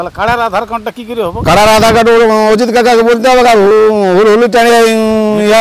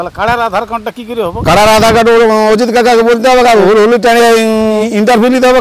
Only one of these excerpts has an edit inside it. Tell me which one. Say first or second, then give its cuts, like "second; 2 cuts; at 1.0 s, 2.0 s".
second; 2 cuts; at 3.6 s, 4.8 s